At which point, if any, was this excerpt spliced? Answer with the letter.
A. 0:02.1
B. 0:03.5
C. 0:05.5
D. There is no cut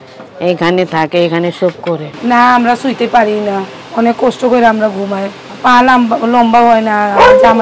A